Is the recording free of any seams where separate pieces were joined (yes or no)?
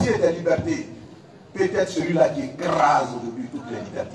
yes